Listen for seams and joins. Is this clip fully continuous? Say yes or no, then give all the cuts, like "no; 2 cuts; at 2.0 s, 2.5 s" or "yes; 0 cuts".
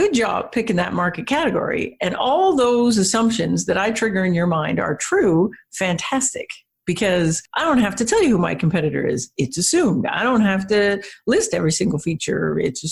yes; 0 cuts